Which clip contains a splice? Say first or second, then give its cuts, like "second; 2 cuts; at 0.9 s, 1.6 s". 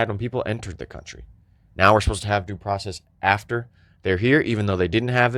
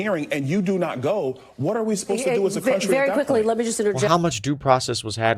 second; 1 cut; at 4.1 s